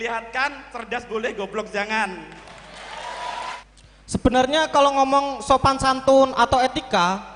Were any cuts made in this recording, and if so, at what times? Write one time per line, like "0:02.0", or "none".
0:03.6